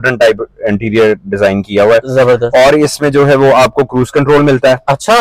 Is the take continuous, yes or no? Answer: yes